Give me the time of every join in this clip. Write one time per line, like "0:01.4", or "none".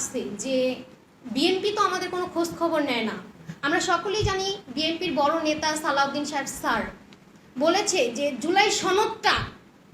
none